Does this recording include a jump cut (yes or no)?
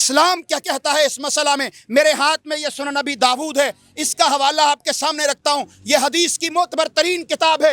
no